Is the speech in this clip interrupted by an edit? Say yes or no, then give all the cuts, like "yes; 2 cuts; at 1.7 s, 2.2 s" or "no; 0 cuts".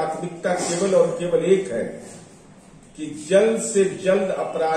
no; 0 cuts